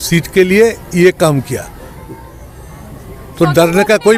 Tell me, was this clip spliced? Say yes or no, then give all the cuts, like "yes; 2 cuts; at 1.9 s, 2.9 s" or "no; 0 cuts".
no; 0 cuts